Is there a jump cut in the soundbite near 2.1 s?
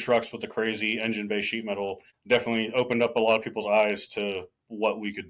yes; 1 cut; at 2.1 s

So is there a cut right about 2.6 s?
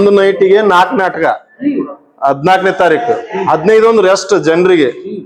no; 0 cuts

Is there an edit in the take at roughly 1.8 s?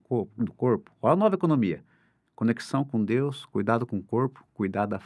no; 0 cuts

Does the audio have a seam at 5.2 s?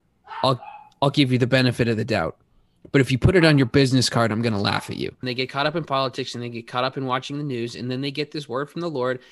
yes; 1 cut; at 5.2 s

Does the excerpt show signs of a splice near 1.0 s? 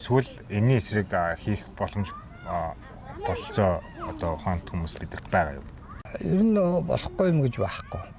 no; 1 cut; at 6.0 s

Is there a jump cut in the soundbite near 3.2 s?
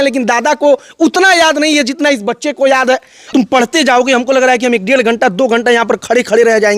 yes; 1 cut; at 3.2 s

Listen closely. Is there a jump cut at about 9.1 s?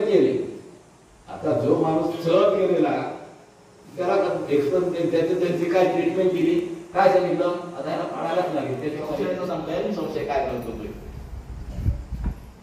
yes; 1 cut; at 9.1 s

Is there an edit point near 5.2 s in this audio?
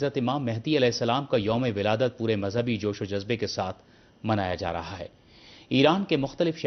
no; 1 cut; at 3.0 s

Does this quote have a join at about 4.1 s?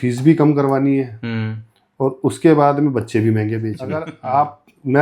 yes; 1 cut; at 4.1 s

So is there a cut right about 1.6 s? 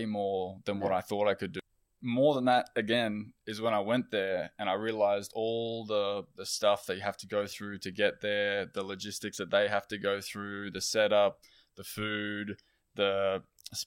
yes; 1 cut; at 1.6 s

